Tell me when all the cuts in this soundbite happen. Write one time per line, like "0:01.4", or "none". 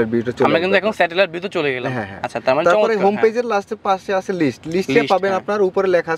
none